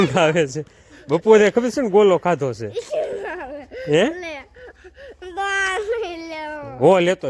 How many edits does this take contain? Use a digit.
0